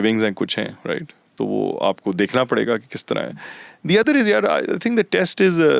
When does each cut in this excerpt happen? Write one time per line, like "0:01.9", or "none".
none